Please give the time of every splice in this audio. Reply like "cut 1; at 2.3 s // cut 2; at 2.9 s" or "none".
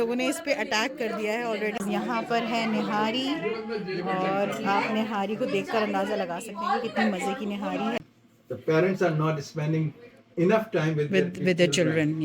cut 1; at 1.8 s // cut 2; at 8.0 s